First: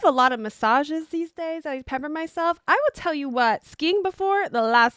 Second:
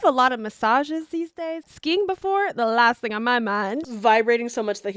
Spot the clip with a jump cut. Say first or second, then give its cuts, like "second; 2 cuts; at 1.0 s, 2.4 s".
second; 2 cuts; at 1.7 s, 3.8 s